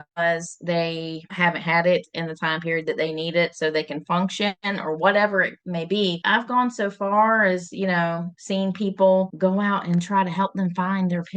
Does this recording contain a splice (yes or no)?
yes